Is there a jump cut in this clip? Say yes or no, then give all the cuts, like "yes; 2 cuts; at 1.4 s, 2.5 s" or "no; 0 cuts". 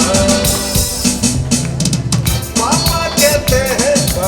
no; 0 cuts